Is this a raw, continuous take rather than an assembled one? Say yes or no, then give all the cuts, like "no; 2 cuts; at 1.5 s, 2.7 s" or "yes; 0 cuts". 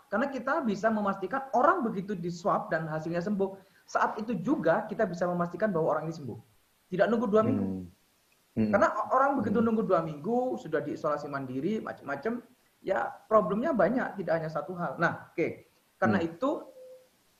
yes; 0 cuts